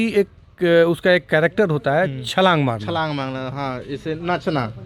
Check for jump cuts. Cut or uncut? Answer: uncut